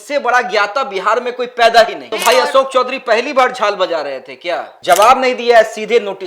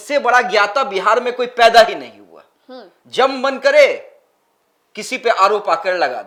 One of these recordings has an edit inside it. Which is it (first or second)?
first